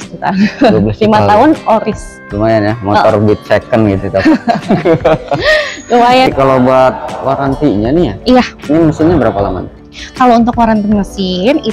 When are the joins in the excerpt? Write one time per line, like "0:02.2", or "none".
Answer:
0:06.3